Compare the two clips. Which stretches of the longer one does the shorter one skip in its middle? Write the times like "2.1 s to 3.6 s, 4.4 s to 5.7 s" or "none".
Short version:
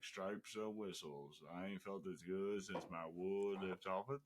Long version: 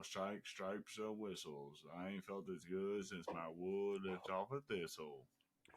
none